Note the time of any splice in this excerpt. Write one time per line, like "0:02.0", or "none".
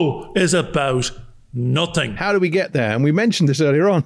0:02.1